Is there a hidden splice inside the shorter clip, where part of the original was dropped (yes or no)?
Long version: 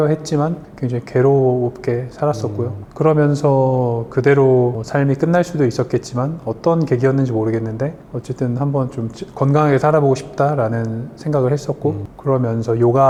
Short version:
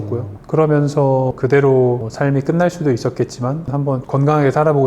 yes